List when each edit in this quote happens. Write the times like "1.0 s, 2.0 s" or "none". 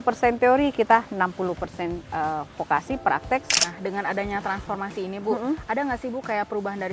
3.5 s